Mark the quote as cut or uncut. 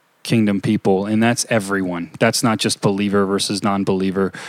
uncut